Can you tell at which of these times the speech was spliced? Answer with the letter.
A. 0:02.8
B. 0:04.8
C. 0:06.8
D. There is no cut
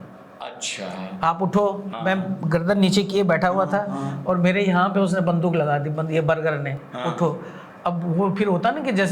D